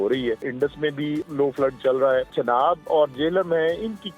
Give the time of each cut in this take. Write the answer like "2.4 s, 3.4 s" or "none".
0.9 s, 2.3 s